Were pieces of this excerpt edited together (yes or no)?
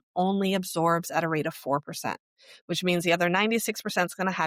no